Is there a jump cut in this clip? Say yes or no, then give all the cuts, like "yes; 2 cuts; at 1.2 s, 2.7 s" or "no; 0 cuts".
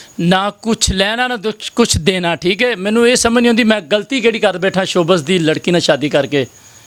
no; 0 cuts